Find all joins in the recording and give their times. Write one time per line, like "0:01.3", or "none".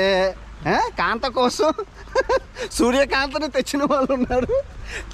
none

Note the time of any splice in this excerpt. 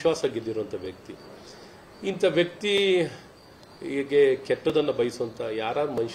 none

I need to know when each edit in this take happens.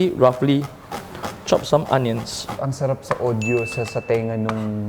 0:02.4

